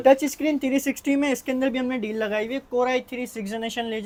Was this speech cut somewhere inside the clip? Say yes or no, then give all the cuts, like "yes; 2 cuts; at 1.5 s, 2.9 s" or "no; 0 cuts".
no; 0 cuts